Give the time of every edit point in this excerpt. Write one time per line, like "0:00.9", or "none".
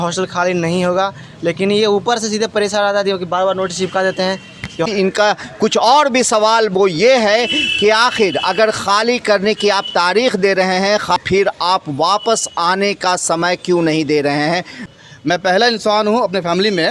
0:04.9
0:11.2
0:14.7